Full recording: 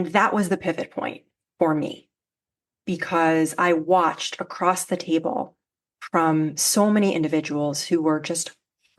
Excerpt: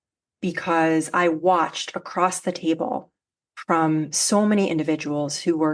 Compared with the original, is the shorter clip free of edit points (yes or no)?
yes